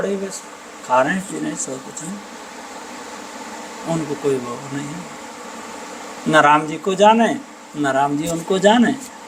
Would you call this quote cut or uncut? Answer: uncut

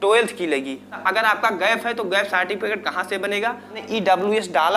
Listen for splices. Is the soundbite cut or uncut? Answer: cut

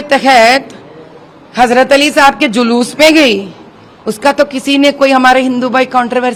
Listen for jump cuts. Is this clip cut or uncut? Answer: uncut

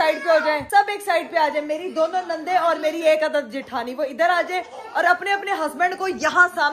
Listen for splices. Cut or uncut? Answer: uncut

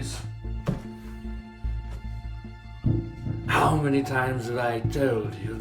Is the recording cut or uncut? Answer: uncut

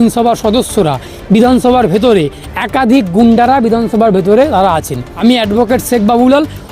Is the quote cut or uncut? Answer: cut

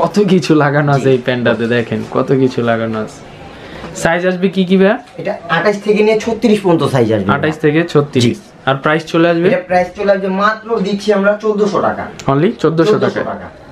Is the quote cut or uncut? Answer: uncut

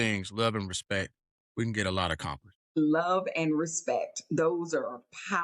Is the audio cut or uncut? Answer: cut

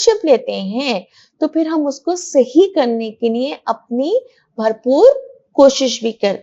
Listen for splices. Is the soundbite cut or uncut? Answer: uncut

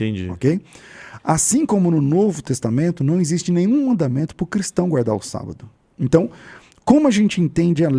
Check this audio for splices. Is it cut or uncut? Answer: uncut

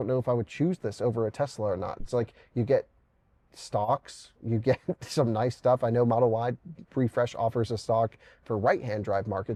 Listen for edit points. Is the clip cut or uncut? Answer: uncut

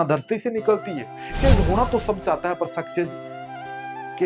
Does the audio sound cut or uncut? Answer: cut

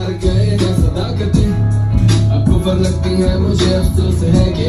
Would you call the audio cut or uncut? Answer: uncut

